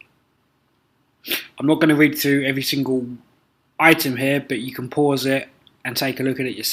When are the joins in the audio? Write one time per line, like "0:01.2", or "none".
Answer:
0:04.8